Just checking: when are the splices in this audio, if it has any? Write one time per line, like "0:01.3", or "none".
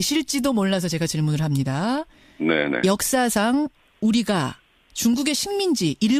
none